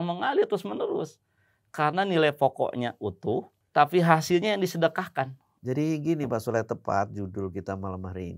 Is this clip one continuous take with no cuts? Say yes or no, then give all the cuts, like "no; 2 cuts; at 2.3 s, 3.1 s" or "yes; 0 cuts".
no; 2 cuts; at 3.6 s, 5.5 s